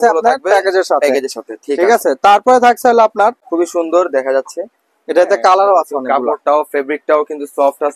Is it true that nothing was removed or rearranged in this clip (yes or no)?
no